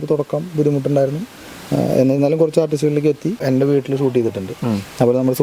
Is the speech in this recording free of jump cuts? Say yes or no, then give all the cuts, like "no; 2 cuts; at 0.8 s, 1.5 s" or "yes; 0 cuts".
no; 1 cut; at 3.4 s